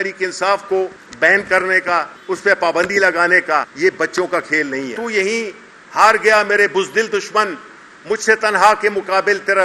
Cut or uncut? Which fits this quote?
cut